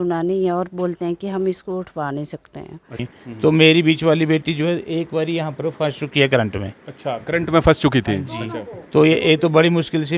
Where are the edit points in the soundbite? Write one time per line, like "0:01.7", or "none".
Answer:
0:03.1

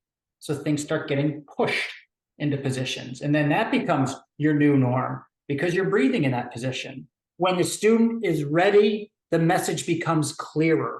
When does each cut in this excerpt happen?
0:07.2

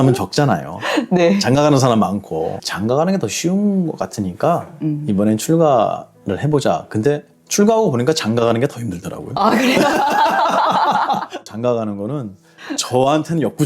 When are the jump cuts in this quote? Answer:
0:02.6
0:11.4

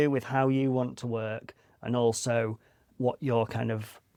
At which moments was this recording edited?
none

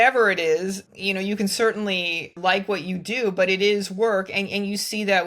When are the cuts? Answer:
0:00.8
0:02.4

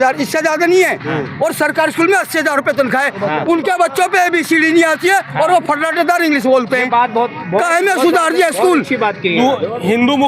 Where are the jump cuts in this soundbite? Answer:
0:09.3

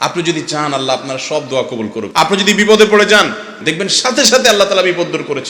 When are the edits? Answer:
0:02.1
0:03.6

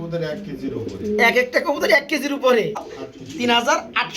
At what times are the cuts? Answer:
0:02.9

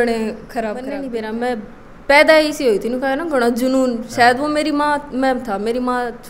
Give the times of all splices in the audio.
0:00.9

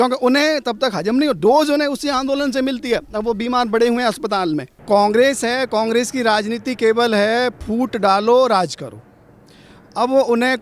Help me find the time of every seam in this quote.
0:04.8

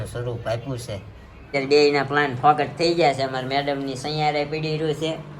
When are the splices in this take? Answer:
0:01.5

